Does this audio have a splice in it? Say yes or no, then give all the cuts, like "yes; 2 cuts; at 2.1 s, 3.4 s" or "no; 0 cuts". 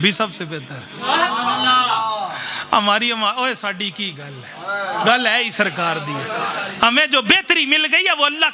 no; 0 cuts